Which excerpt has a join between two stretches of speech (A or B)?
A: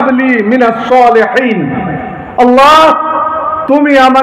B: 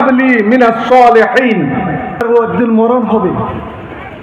B